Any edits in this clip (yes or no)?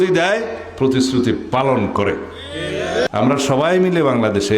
yes